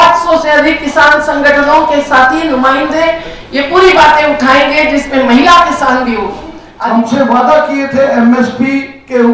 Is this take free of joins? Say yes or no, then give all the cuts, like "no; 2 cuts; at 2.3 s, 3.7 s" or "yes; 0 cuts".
no; 1 cut; at 6.6 s